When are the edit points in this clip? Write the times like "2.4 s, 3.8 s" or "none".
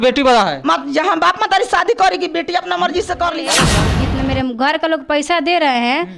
3.7 s